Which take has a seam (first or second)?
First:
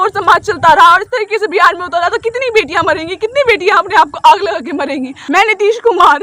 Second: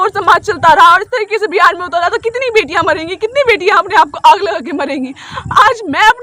first